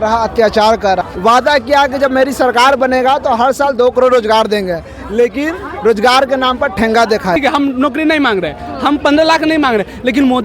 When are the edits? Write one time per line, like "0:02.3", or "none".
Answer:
0:01.0
0:07.4